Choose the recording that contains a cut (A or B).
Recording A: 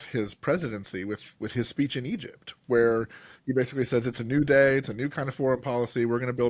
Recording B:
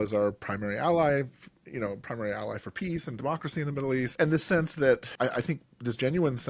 B